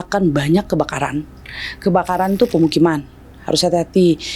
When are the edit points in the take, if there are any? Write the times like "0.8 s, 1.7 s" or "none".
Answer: none